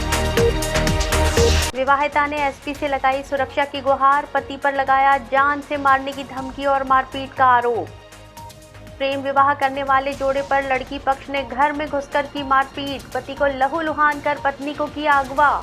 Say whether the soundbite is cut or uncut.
cut